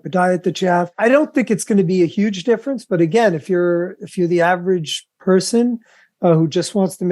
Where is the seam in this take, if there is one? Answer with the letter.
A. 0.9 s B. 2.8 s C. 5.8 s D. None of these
A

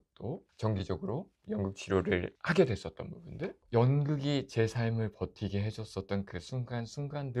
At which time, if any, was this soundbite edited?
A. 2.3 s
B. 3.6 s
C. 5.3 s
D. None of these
B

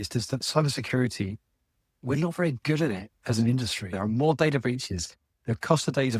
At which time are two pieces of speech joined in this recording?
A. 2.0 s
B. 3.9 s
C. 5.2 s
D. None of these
B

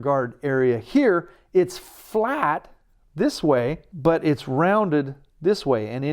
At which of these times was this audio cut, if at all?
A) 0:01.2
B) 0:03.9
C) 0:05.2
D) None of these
B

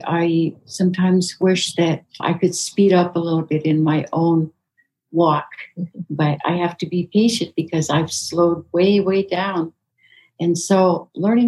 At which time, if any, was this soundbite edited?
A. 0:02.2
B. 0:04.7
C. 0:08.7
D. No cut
A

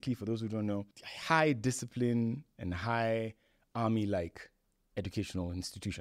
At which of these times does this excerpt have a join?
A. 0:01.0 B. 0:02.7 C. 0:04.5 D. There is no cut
D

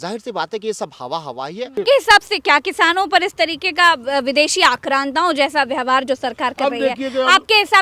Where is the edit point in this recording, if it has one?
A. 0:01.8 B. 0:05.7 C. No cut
A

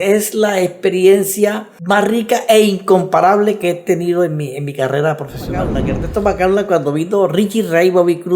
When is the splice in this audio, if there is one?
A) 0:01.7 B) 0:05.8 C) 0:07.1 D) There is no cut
B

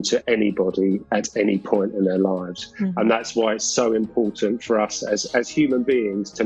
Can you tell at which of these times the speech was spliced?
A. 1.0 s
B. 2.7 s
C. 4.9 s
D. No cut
D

